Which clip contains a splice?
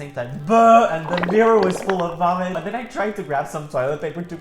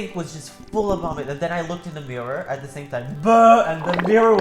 first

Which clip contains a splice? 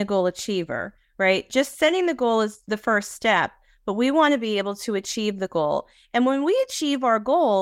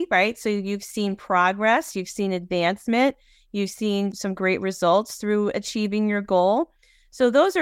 first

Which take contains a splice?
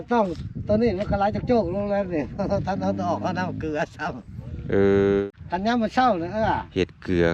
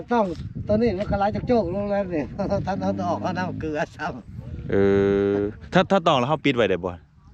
first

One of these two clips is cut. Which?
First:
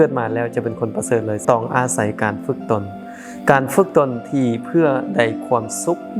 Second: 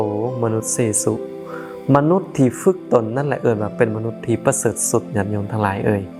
first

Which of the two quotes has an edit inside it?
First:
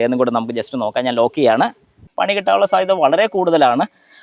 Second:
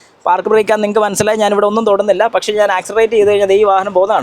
first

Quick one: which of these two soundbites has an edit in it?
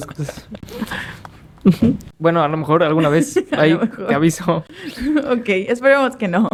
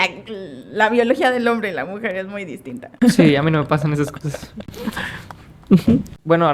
second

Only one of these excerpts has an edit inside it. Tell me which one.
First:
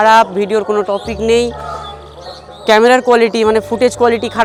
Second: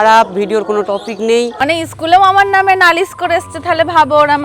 second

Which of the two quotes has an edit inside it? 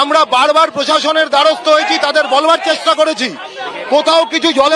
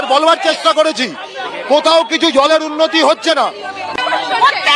second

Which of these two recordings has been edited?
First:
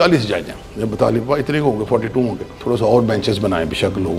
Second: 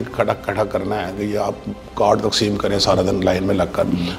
first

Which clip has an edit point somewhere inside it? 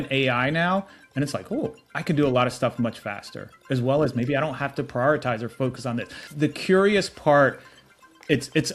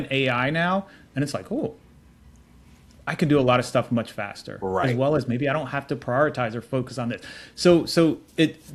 first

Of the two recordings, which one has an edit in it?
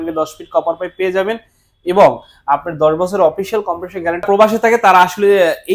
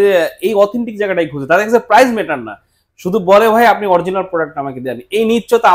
first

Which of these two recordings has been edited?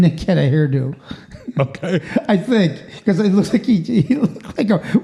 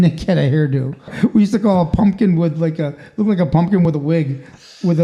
second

